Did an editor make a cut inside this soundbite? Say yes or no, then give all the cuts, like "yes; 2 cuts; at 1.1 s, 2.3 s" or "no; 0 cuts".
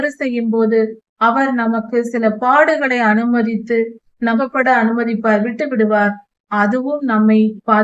yes; 1 cut; at 4.5 s